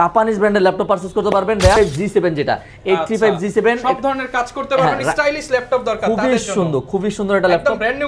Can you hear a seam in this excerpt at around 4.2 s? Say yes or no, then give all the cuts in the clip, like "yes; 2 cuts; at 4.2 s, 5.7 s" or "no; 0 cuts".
no; 1 cut; at 1.8 s